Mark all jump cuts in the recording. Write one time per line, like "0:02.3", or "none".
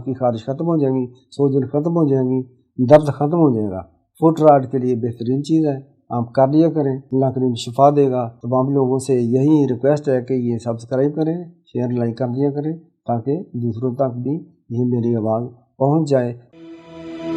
0:07.0
0:16.4